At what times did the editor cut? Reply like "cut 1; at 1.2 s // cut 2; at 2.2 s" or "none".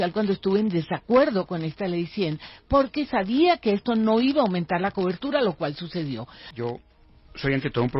cut 1; at 6.4 s